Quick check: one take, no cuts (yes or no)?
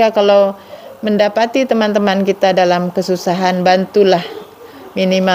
yes